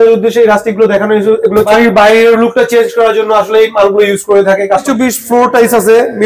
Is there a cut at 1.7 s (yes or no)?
yes